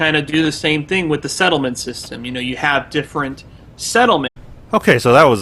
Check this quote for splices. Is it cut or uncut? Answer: uncut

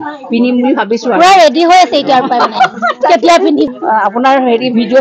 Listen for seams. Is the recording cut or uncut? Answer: cut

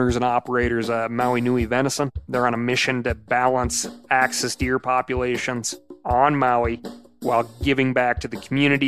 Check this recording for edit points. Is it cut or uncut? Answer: cut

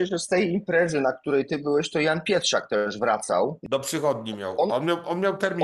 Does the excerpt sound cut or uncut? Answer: cut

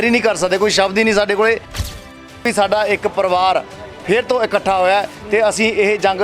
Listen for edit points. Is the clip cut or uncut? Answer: cut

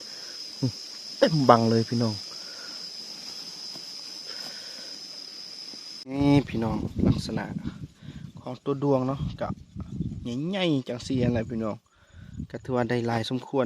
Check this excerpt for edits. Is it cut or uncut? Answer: cut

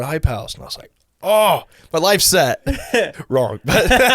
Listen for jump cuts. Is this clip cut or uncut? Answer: cut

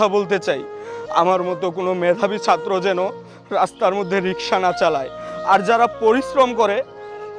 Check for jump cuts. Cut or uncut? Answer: uncut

